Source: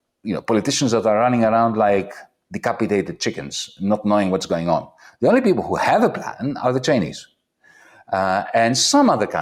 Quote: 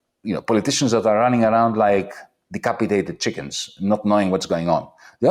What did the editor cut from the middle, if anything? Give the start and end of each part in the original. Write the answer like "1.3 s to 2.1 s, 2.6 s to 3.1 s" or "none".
none